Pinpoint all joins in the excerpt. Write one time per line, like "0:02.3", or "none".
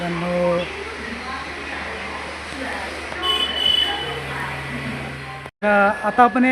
0:05.5